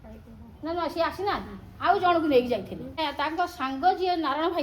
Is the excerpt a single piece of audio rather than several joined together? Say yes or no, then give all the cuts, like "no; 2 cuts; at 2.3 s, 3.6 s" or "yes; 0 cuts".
no; 1 cut; at 3.0 s